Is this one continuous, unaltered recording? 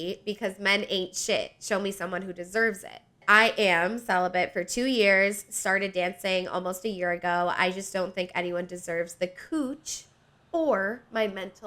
no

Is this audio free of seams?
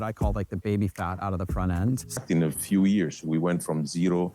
no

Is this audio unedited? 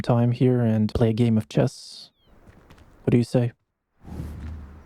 yes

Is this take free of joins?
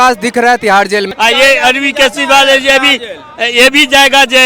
no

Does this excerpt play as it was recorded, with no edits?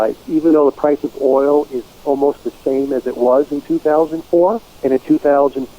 no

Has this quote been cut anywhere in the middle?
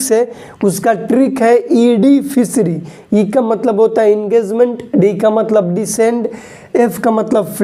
no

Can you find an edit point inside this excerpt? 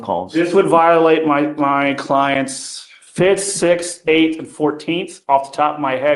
no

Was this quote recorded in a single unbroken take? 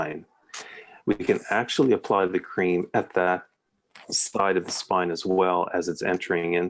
yes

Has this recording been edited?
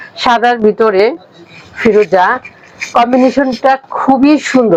no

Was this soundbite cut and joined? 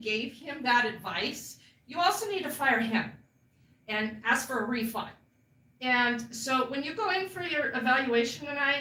no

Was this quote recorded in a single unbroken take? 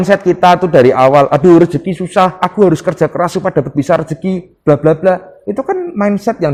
yes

